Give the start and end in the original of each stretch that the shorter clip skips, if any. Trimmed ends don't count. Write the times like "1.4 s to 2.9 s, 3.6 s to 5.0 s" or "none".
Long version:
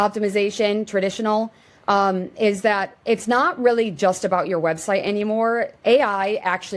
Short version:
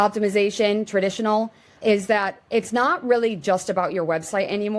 1.7 s to 2.3 s